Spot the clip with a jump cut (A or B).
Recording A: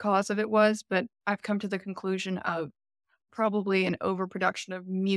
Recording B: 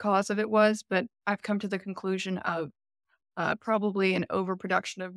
A